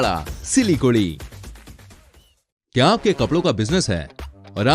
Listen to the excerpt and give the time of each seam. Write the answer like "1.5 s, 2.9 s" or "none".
none